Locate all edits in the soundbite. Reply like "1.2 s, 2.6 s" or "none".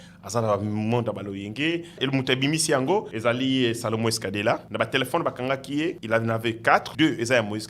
2.0 s, 3.1 s, 4.7 s, 6.0 s, 6.9 s